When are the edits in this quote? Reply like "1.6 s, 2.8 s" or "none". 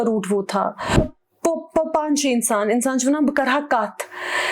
1.0 s